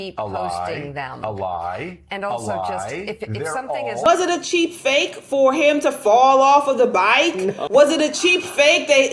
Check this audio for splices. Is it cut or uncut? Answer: cut